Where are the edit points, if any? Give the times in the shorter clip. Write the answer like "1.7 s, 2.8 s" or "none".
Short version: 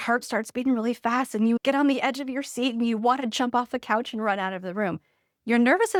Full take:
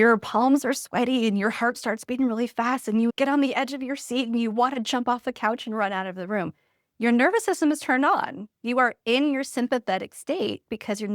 none